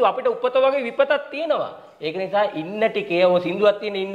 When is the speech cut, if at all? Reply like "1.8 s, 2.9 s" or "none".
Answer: none